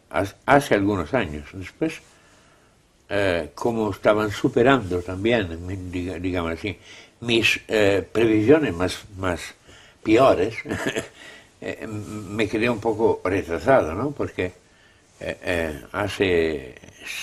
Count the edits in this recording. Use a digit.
1